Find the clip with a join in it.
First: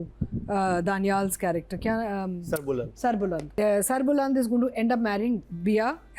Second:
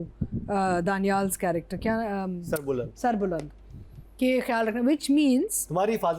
first; 1 cut; at 3.5 s

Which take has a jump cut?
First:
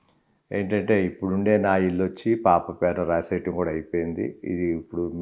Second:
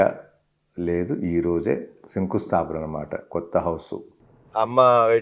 second; 1 cut; at 4.2 s

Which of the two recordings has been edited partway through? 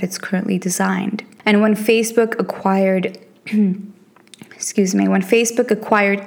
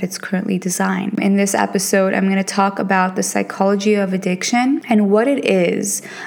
second; 2 cuts; at 1.2 s, 4.8 s

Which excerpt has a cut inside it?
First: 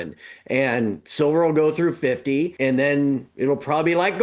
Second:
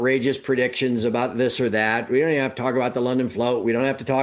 first; 2 cuts; at 2.5 s, 3.3 s

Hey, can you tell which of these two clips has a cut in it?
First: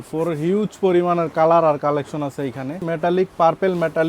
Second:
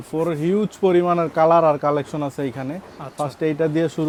first; 1 cut; at 2.8 s

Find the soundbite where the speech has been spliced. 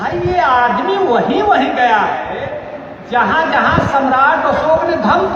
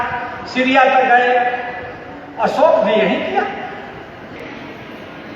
second; 1 cut; at 4.4 s

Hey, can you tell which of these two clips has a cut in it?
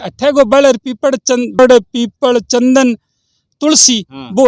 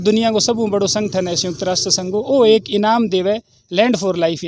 first; 1 cut; at 1.6 s

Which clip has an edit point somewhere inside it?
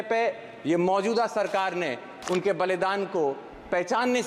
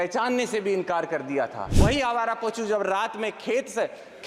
second; 1 cut; at 1.6 s

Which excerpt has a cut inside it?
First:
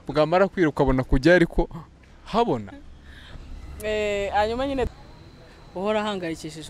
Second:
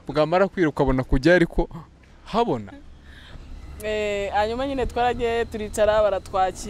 first; 1 cut; at 4.9 s

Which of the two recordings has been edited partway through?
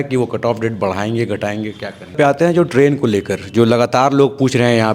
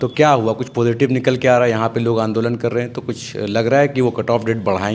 first; 1 cut; at 2.1 s

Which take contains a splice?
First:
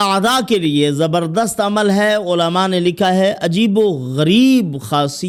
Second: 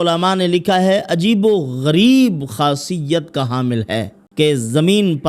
second; 1 cut; at 4.2 s

